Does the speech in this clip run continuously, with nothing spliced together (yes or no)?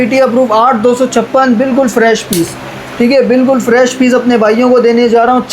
yes